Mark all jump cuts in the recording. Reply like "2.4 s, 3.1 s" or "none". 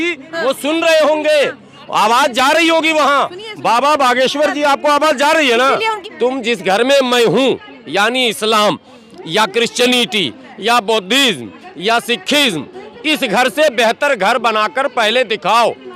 6.0 s